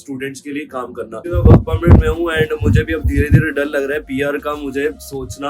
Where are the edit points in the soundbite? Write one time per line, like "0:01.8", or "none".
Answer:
0:01.2

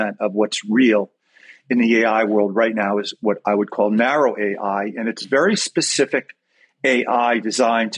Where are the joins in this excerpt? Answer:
none

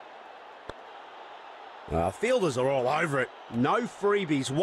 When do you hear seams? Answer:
0:01.9

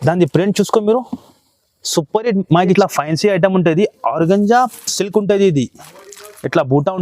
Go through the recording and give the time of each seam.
0:02.8

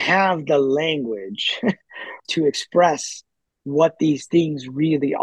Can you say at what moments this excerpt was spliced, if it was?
0:02.2

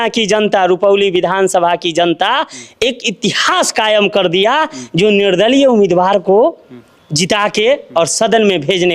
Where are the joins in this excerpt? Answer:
none

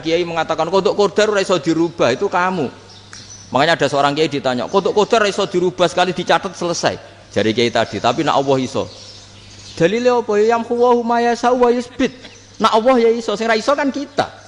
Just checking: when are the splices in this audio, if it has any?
none

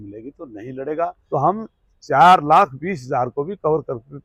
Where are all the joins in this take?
0:01.2

